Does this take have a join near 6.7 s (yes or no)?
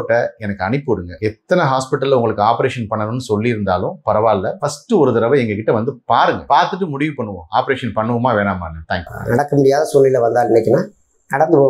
no